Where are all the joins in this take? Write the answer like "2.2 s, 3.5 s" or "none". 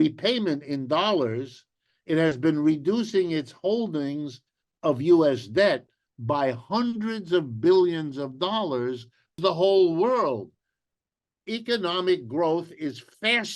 9.3 s